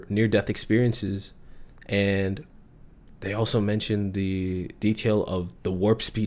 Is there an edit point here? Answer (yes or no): no